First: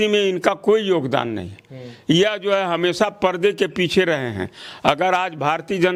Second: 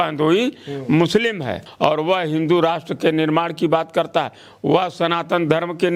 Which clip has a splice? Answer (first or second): second